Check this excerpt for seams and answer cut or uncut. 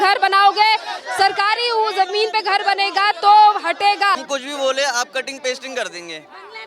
cut